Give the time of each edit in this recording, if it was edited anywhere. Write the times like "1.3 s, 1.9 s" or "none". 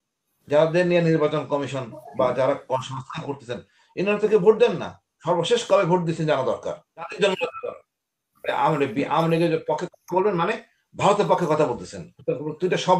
7.1 s